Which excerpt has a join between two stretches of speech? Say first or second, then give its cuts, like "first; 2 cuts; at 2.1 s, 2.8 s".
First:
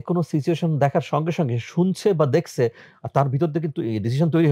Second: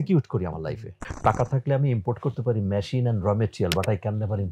second; 1 cut; at 1.0 s